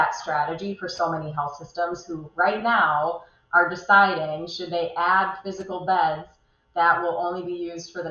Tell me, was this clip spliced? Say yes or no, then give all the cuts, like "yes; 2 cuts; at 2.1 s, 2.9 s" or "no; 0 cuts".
no; 0 cuts